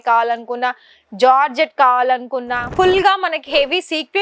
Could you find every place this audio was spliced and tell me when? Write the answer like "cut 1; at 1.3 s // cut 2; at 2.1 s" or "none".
cut 1; at 2.6 s